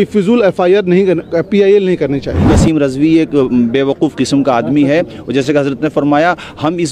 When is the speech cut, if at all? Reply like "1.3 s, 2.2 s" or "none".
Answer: 2.4 s